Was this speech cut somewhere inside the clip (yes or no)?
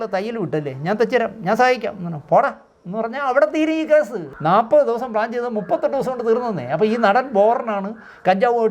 yes